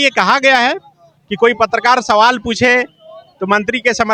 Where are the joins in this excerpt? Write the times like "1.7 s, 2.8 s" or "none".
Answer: none